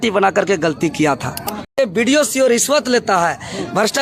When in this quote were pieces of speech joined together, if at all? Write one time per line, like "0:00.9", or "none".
0:01.8